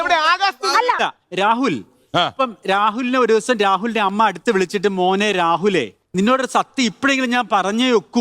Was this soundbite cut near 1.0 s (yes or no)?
yes